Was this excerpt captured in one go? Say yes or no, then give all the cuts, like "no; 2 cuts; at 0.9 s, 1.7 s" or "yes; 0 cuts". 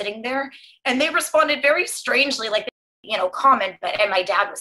no; 1 cut; at 3.0 s